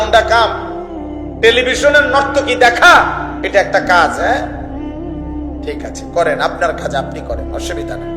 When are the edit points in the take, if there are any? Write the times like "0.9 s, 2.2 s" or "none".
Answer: 7.0 s